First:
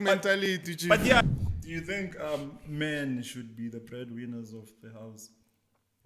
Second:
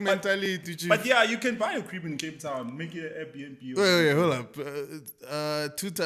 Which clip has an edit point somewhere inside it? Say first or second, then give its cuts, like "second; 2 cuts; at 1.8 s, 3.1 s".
first; 1 cut; at 1.2 s